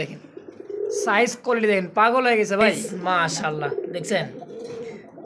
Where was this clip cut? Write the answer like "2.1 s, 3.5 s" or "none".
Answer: 2.8 s